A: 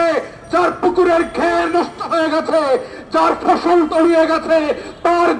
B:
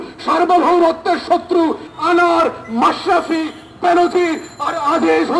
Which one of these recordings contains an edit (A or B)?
B